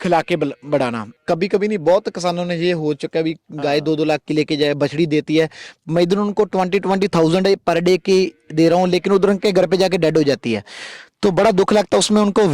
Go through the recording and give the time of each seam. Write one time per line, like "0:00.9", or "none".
0:01.1